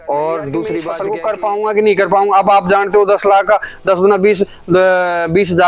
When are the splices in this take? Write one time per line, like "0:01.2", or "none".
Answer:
0:00.9

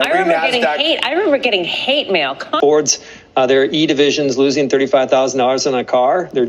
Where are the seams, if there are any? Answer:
0:02.5

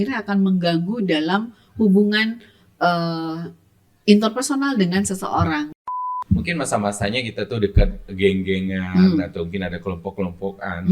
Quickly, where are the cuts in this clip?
0:06.0

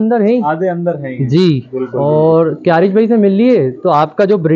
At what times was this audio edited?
0:01.9

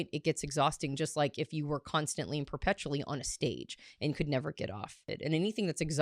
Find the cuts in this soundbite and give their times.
0:05.1

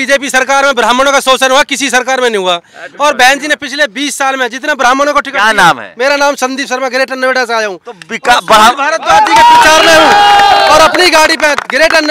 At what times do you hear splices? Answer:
none

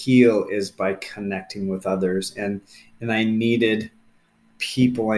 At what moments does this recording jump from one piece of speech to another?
none

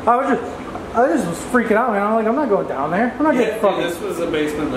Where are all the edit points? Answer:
none

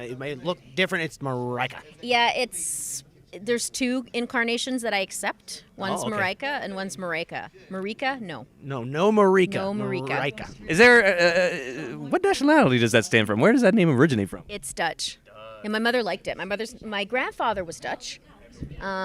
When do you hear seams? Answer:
0:15.8

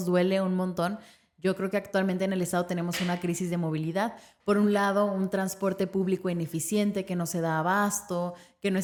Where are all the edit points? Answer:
none

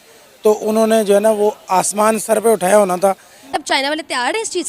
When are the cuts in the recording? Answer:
0:03.5

